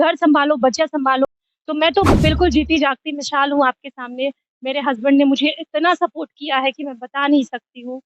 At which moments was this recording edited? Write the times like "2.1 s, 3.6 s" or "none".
1.3 s